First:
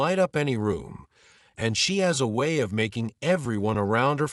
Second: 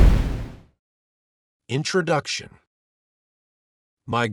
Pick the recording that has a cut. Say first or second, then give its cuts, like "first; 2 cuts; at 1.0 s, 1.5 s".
second; 1 cut; at 1.1 s